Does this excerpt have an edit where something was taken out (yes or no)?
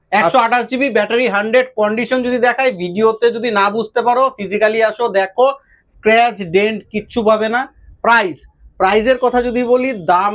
no